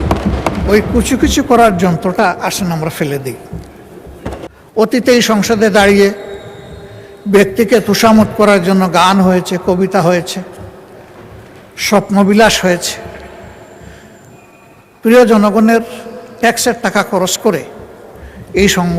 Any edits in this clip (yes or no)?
yes